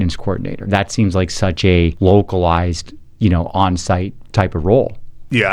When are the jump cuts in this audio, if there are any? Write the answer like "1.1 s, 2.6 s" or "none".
1.9 s, 4.2 s